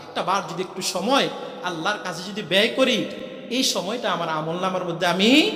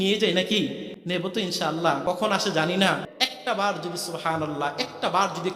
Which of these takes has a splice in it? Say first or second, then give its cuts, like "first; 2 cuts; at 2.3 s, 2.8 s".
second; 3 cuts; at 0.9 s, 2.0 s, 3.1 s